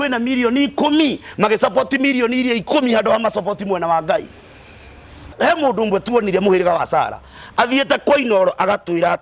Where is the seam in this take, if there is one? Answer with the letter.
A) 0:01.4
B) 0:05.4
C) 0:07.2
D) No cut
B